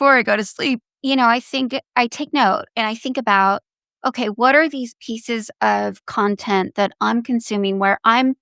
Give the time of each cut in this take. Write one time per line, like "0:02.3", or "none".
0:00.9